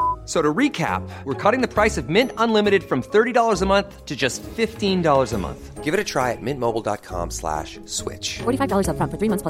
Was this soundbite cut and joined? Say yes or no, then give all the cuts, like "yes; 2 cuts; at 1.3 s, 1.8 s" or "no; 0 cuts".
no; 0 cuts